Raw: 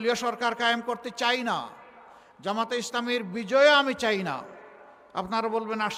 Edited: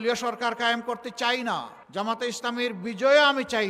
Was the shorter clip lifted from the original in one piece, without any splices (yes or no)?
no